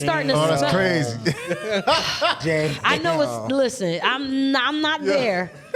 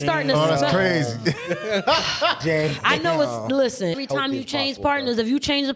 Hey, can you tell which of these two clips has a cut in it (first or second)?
second